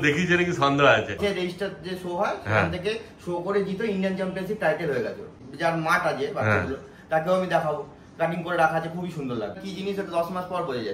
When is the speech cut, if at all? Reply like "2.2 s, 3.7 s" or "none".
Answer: 1.2 s, 5.4 s, 9.6 s

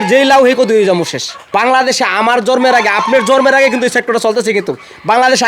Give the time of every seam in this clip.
1.4 s

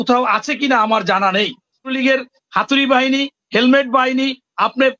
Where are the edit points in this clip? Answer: 1.9 s

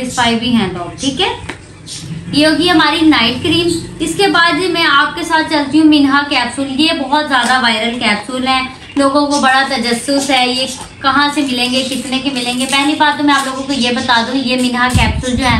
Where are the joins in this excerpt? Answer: none

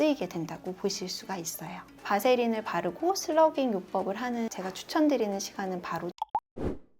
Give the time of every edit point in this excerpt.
2.0 s, 6.1 s

